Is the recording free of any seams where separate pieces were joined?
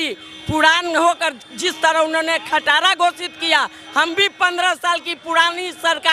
yes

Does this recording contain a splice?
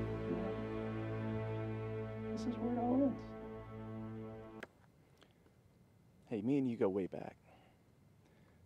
yes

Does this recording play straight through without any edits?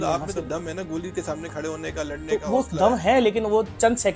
yes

